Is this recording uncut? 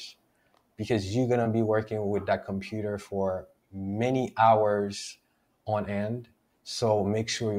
yes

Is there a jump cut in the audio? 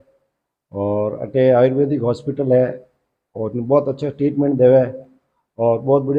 no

